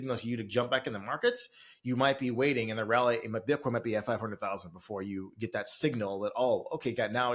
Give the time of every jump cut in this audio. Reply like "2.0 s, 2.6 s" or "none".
none